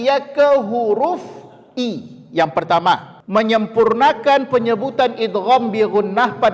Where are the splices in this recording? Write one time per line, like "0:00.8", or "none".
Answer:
0:03.1